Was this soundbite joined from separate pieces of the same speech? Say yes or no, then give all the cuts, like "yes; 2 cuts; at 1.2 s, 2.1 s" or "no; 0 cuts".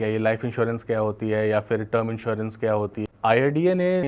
yes; 1 cut; at 3.0 s